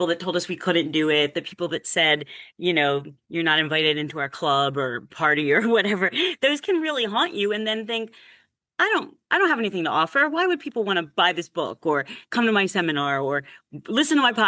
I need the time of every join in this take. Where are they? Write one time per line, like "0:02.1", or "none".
none